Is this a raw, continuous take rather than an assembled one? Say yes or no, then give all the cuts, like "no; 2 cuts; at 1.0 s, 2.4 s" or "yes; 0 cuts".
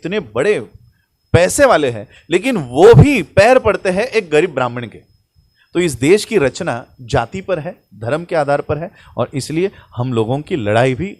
yes; 0 cuts